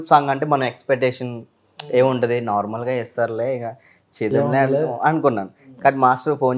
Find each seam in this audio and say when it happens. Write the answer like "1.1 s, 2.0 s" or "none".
none